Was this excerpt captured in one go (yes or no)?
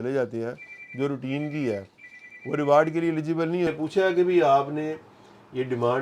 no